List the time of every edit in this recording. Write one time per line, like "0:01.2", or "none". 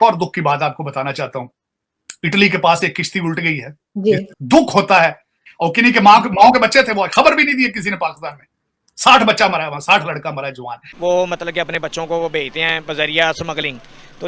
0:04.3
0:10.8